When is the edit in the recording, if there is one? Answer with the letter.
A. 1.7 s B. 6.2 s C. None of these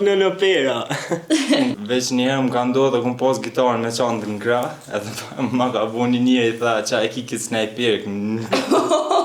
A